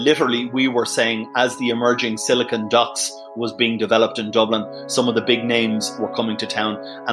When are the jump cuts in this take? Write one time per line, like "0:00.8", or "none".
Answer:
none